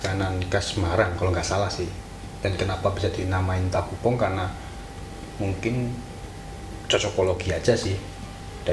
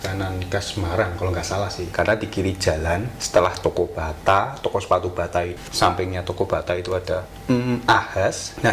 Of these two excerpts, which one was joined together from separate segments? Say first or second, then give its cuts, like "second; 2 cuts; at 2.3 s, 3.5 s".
second; 4 cuts; at 1.8 s, 3.1 s, 5.5 s, 7.3 s